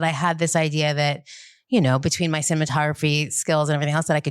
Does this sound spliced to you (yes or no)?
no